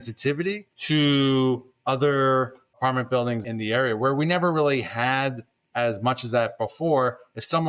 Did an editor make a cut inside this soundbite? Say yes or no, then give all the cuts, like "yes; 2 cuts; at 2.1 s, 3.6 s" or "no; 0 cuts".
yes; 1 cut; at 3.4 s